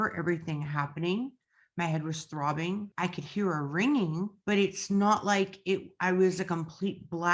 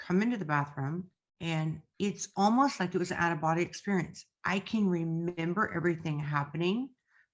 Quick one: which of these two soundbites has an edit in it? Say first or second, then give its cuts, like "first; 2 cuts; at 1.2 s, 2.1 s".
first; 2 cuts; at 2.9 s, 4.4 s